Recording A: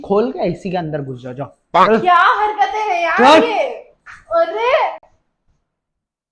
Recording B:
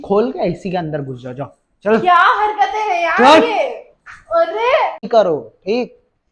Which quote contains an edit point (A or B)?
B